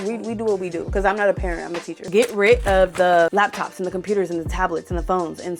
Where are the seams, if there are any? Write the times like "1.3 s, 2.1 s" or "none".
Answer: 0.9 s, 2.0 s, 3.3 s